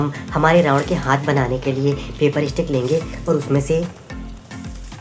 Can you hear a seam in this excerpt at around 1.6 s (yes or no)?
no